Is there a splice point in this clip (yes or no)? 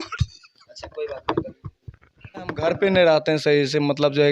yes